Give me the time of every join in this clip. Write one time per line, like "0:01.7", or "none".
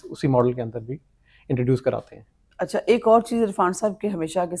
none